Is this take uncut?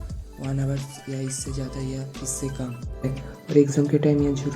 no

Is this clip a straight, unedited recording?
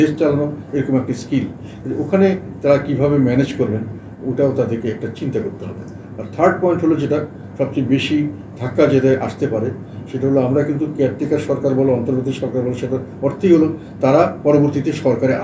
yes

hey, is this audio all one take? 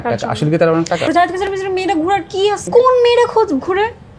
no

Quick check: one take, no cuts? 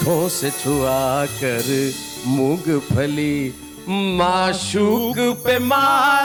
yes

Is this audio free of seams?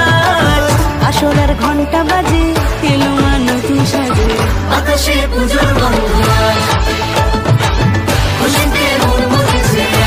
yes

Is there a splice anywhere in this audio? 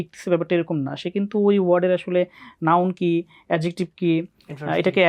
no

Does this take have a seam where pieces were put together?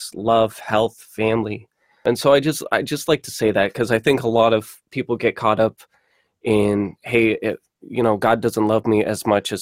yes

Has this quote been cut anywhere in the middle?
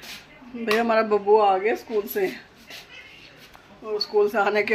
no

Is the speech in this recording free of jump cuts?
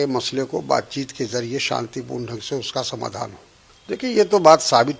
yes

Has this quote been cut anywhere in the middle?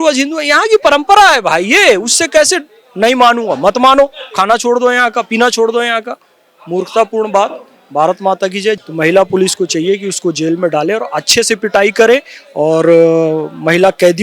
yes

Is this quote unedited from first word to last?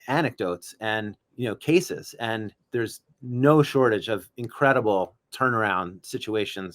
no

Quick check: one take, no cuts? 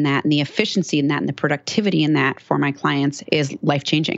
no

